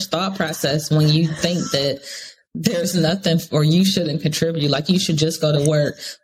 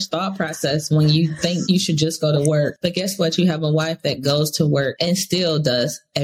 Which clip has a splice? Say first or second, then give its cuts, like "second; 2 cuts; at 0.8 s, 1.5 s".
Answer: second; 3 cuts; at 1.6 s, 2.8 s, 5.0 s